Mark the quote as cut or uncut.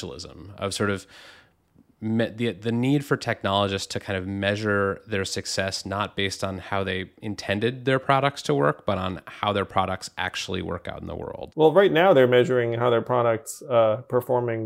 uncut